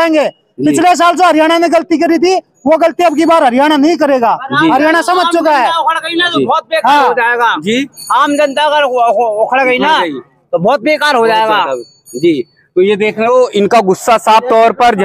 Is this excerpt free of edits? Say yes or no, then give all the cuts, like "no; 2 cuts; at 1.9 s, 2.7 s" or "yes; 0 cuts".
yes; 0 cuts